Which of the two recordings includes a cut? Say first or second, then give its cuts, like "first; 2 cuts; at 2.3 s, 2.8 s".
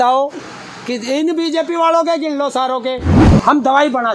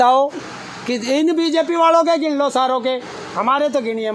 first; 1 cut; at 3.2 s